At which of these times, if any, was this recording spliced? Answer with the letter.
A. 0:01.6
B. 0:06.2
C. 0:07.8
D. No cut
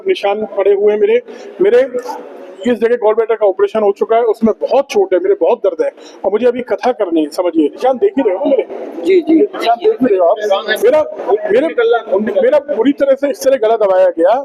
C